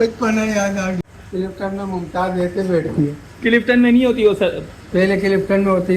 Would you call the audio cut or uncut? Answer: cut